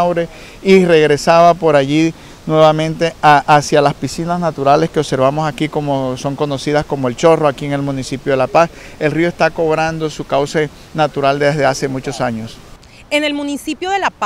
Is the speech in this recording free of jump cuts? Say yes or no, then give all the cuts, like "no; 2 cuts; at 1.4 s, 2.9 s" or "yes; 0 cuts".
yes; 0 cuts